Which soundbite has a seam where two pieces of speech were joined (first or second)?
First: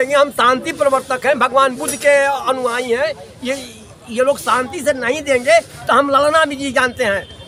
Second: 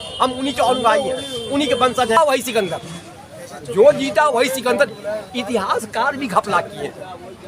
second